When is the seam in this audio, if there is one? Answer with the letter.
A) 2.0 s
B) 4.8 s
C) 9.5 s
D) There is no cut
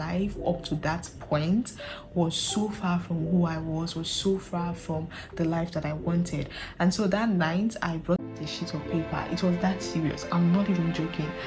D